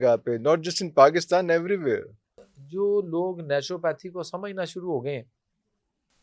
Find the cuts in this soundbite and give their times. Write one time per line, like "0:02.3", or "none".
0:02.6